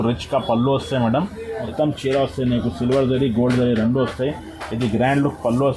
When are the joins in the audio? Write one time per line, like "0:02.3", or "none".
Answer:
0:01.7

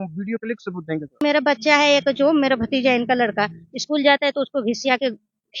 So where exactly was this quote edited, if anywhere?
0:01.2

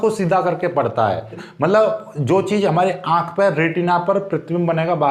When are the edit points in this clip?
0:01.4

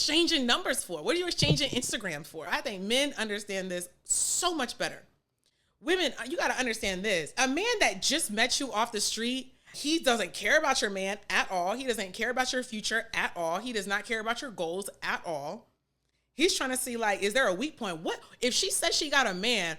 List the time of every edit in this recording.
0:02.5
0:07.3
0:09.7

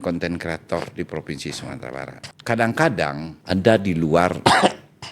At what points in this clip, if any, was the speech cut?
0:02.2
0:03.3

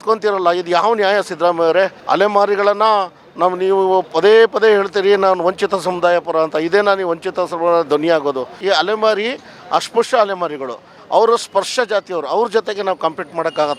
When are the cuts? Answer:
0:02.0
0:08.6

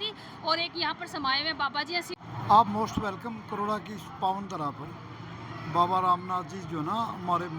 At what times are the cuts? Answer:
0:02.2

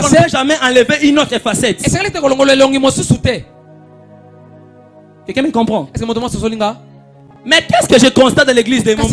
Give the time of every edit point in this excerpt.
none

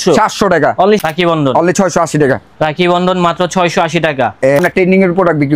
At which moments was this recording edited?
0:01.0
0:04.6

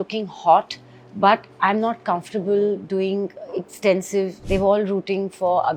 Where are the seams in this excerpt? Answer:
0:04.4

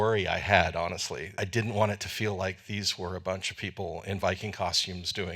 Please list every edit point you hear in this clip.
0:01.3

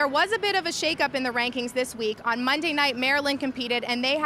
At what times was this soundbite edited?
none

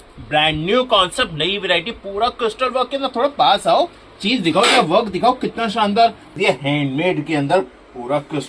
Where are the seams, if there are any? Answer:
0:06.3

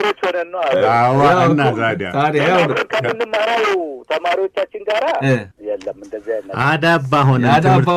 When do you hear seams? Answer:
none

